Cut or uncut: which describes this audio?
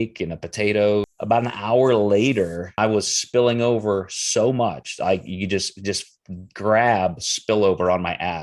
cut